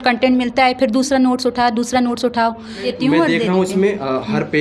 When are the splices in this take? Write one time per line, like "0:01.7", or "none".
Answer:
0:02.9